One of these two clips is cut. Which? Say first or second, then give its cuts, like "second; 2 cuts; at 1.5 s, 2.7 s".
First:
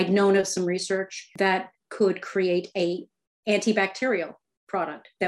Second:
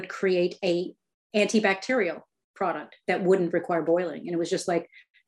first; 1 cut; at 1.2 s